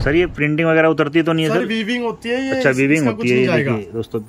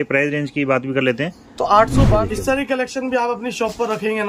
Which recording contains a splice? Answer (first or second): second